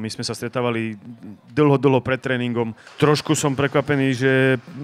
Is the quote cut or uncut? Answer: cut